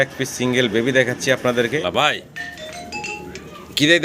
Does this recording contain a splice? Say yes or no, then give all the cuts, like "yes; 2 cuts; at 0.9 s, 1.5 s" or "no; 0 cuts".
yes; 1 cut; at 1.8 s